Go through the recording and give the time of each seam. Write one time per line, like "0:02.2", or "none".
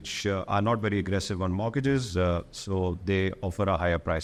none